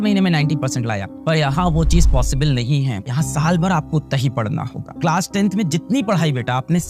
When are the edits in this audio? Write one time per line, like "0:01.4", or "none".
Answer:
0:03.0
0:05.0